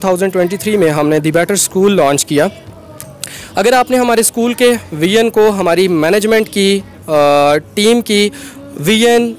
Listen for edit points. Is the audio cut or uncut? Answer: uncut